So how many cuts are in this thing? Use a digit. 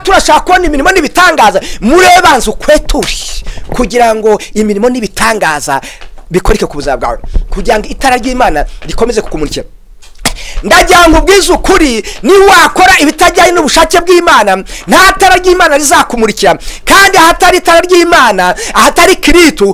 0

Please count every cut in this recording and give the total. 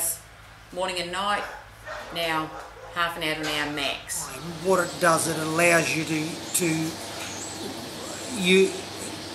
1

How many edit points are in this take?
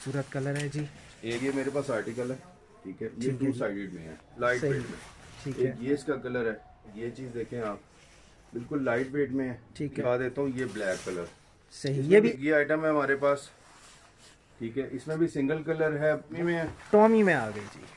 6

